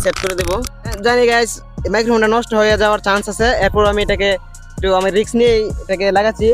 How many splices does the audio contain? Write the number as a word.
one